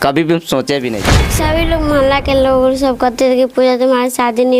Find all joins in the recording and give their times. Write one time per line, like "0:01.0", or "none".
0:01.2

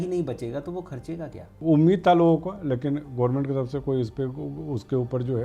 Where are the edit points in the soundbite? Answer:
0:01.5

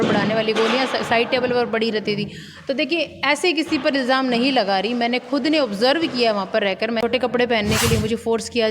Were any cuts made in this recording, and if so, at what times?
0:07.0

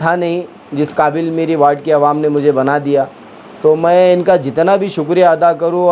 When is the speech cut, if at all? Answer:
none

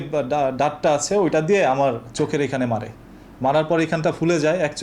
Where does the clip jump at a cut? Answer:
none

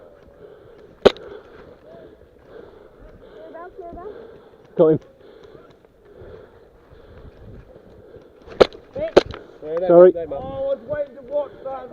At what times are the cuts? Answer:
0:01.0
0:08.5

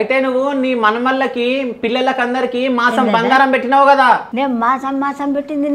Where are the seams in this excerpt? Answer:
none

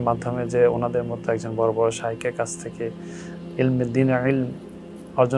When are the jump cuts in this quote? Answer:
none

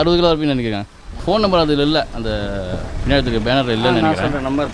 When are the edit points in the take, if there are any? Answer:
0:01.2

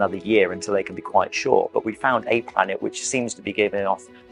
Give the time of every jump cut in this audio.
none

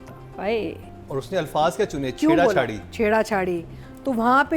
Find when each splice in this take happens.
0:00.9

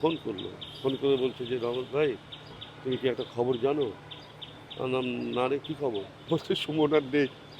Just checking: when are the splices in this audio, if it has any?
0:06.1

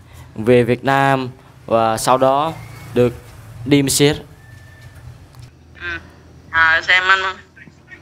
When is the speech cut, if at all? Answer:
0:05.4

